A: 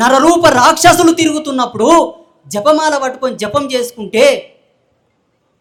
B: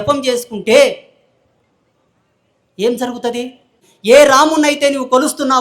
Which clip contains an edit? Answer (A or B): B